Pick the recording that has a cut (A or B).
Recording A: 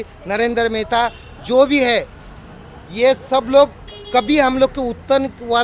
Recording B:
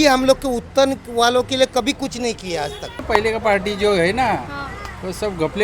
B